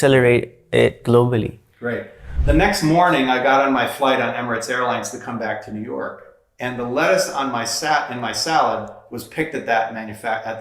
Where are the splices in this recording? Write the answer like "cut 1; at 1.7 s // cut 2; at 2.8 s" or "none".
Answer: cut 1; at 2.2 s